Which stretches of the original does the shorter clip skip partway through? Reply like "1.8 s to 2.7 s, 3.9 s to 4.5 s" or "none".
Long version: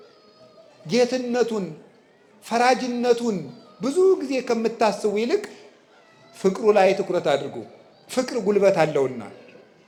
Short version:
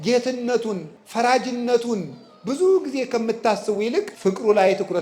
1.8 s to 2.3 s, 5.5 s to 6.3 s